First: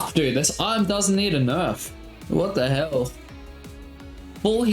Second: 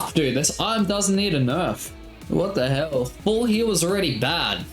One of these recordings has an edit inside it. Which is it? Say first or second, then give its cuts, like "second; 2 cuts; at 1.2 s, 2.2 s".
second; 1 cut; at 3.1 s